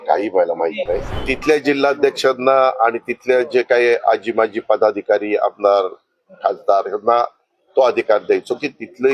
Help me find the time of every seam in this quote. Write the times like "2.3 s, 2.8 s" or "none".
1.1 s